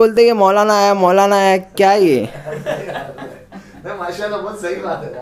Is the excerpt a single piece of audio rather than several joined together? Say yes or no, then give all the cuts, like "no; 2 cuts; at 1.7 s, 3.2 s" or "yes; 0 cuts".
yes; 0 cuts